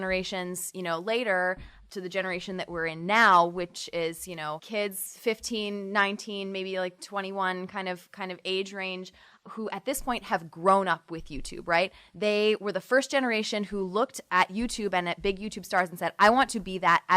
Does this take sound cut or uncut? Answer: cut